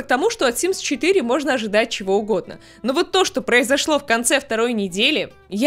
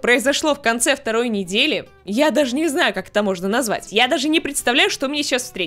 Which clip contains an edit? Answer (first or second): second